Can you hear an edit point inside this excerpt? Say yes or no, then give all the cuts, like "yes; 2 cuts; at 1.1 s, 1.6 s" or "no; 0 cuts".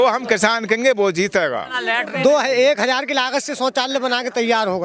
yes; 1 cut; at 1.8 s